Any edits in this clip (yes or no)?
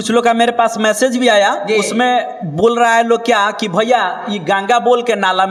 no